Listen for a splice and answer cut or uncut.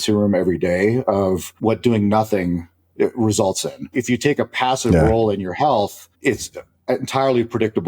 cut